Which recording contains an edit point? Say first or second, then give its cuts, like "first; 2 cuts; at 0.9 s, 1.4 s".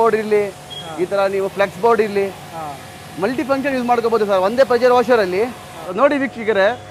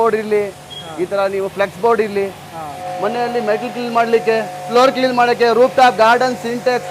second; 2 cuts; at 2.8 s, 4.6 s